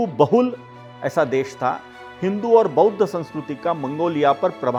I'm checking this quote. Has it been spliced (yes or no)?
no